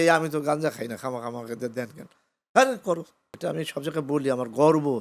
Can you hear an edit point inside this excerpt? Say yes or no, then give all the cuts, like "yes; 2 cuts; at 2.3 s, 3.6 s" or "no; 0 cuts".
yes; 1 cut; at 3.3 s